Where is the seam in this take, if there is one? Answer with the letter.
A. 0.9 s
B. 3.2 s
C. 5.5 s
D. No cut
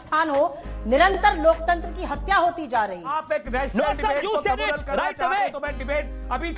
B